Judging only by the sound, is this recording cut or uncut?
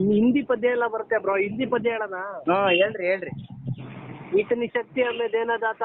uncut